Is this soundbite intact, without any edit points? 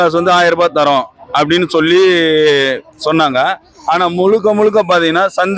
yes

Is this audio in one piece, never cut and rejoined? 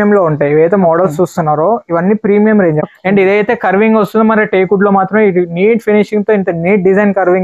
no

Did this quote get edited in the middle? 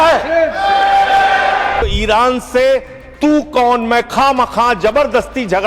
yes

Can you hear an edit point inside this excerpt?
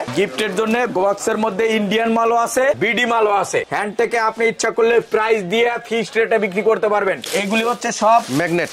yes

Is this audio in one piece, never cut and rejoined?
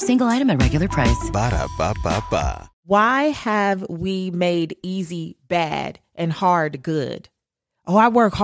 no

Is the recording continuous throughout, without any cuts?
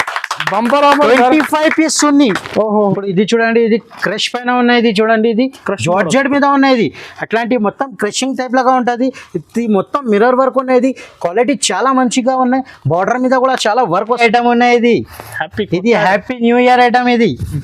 no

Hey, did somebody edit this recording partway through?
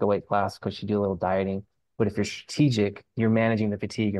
no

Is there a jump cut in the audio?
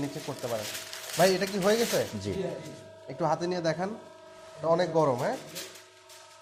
no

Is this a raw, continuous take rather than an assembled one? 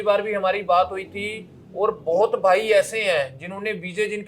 yes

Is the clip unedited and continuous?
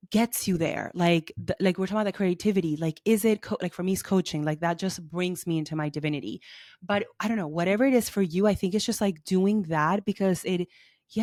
yes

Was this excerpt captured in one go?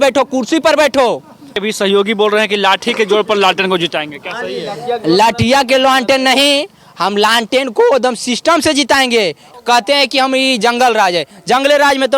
no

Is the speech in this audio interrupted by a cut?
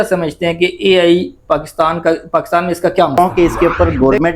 yes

